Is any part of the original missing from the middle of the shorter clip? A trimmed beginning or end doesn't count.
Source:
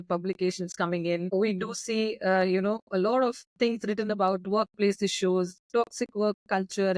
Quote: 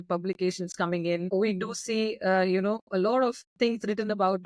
no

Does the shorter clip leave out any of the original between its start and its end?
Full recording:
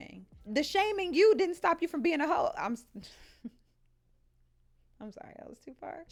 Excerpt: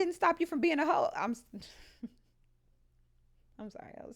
no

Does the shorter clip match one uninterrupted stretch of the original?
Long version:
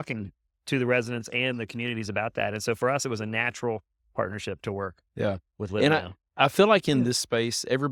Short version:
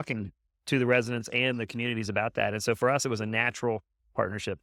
yes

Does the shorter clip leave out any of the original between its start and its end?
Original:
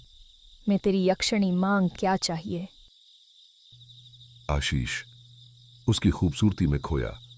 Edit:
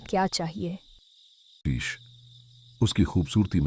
yes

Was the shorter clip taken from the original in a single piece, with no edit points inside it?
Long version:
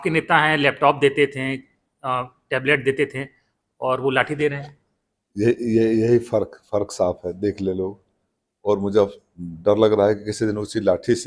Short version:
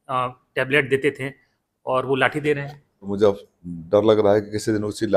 no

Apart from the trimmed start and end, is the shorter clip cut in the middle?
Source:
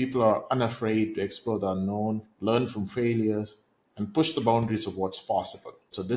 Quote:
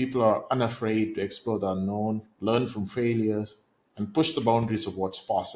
no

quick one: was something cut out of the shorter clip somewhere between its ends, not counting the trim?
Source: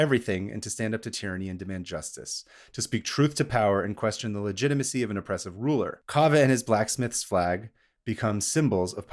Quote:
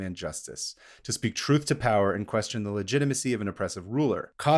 no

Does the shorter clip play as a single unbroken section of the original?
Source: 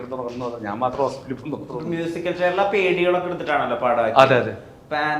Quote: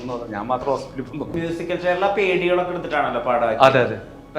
no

